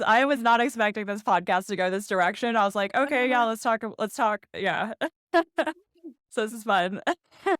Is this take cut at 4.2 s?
no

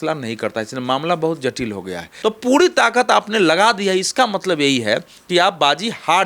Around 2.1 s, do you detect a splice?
yes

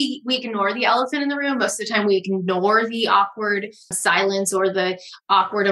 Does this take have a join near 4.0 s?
yes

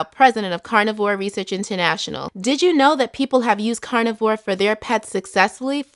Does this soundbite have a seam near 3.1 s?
no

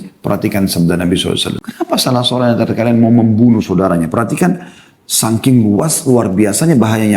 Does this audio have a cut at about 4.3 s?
no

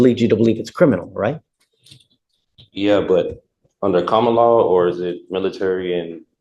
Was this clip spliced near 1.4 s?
no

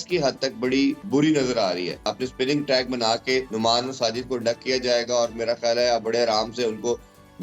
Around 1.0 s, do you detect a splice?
yes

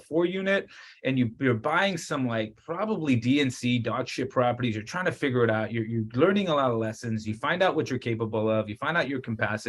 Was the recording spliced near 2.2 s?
no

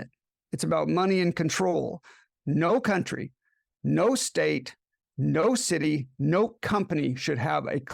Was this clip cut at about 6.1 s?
no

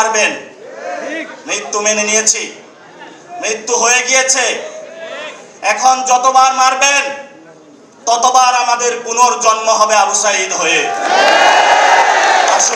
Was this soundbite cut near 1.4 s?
no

